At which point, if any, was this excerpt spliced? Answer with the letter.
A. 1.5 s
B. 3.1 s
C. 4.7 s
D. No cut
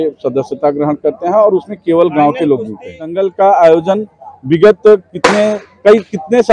B